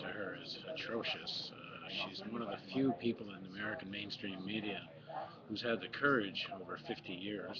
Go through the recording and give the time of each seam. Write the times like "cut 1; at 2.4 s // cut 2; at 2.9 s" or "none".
none